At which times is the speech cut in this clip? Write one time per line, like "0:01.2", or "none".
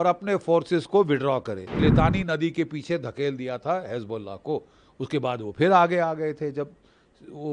0:01.8

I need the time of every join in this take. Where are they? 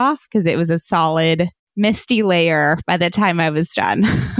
0:01.6

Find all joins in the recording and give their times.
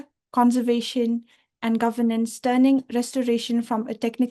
none

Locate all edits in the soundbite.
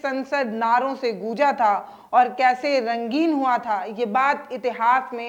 none

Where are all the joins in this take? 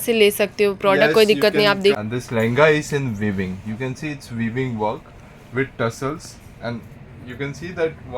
0:02.0

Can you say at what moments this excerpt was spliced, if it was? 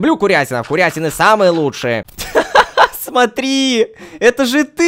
0:02.2

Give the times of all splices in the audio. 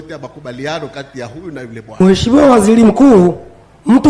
0:02.0

